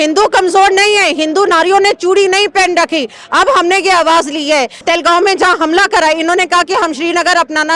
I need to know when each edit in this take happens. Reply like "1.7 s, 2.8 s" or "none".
4.8 s